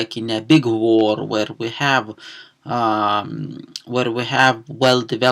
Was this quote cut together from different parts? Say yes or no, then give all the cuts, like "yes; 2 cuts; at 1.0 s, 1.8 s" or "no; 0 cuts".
yes; 1 cut; at 3.3 s